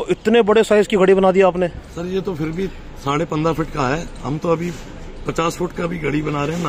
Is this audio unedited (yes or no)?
yes